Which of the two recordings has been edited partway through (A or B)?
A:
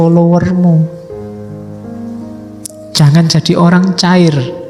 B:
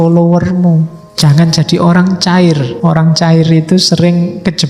B